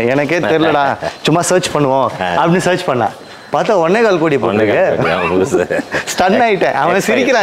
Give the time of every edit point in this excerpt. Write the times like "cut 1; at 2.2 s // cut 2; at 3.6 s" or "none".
none